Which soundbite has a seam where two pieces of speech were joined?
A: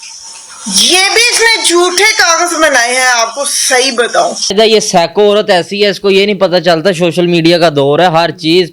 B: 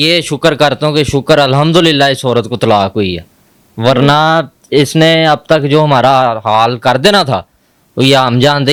A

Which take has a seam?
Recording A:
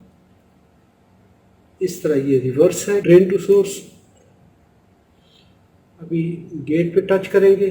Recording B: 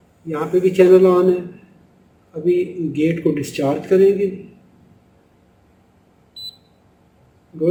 A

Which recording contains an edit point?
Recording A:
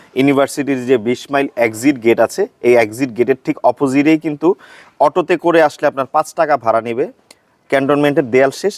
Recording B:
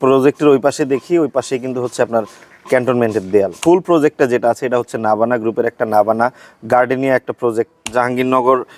B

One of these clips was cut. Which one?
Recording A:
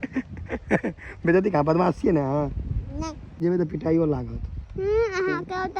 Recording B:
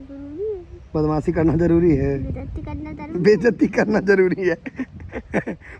A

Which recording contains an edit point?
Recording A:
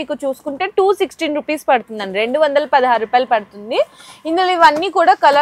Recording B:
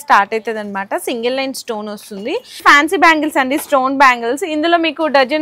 B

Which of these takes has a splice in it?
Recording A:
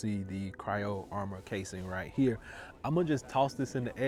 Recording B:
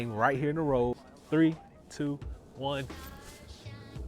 B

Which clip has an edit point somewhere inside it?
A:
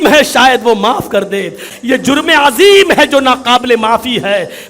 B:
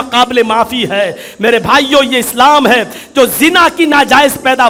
A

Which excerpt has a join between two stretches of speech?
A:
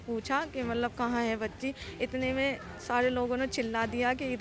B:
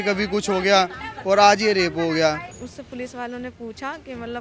B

